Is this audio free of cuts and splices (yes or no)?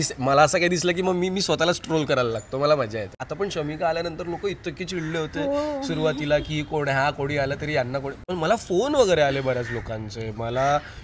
no